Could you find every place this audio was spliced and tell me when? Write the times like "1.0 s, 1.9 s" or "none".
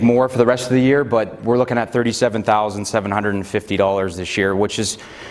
none